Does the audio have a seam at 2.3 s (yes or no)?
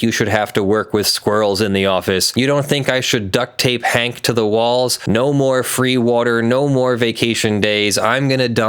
yes